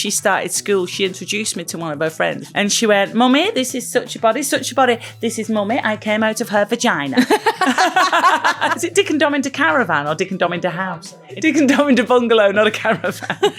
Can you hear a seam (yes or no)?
yes